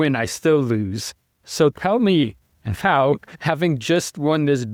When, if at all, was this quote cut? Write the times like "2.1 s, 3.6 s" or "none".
none